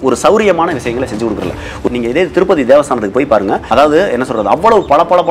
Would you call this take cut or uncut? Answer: cut